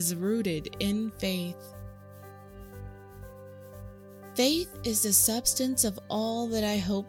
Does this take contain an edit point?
no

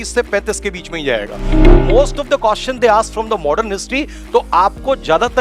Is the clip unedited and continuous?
no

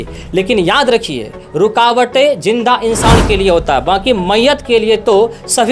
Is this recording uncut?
yes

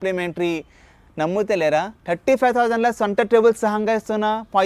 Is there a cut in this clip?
no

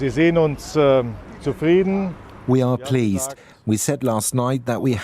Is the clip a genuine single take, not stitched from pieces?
no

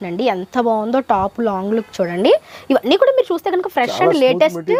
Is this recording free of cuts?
yes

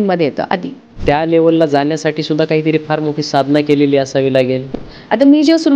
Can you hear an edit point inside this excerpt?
yes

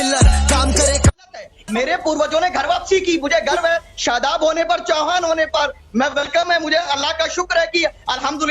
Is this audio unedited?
no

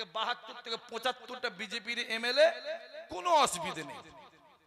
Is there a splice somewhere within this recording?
no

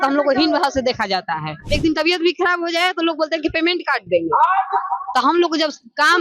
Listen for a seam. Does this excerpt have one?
yes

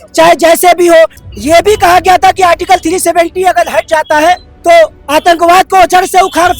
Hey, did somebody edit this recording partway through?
yes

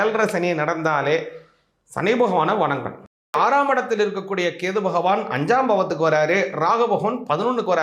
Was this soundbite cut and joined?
yes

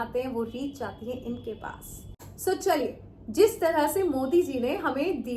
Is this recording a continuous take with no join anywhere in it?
yes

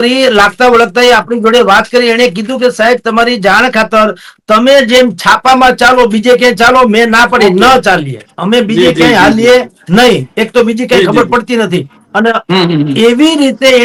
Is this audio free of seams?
yes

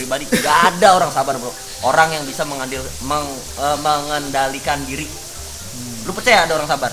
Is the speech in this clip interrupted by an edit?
no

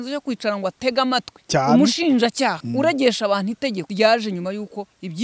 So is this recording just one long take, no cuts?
no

